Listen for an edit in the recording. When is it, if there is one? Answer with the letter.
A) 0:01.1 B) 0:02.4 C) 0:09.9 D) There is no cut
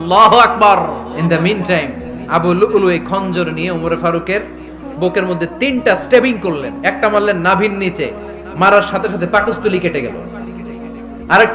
A